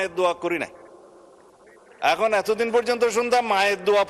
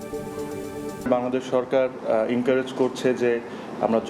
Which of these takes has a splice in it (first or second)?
second